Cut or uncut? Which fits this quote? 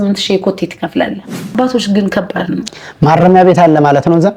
cut